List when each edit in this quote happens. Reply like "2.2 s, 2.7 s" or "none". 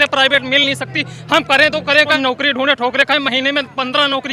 2.2 s